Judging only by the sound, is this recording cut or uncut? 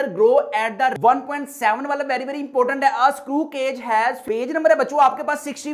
cut